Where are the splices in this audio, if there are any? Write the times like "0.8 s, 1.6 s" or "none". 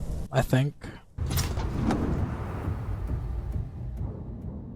none